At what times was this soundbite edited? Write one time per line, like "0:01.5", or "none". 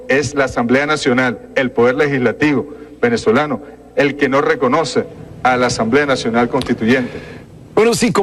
0:06.5